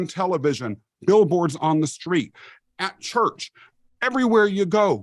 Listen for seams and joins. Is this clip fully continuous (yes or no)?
yes